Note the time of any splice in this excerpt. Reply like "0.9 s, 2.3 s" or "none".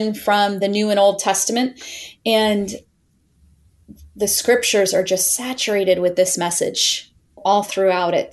7.4 s